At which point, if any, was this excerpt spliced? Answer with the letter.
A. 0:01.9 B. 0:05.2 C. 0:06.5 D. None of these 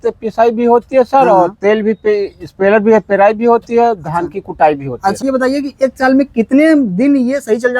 B